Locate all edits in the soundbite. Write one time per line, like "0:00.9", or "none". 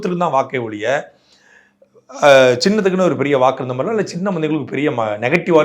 none